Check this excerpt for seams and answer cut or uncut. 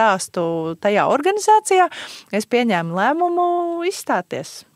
uncut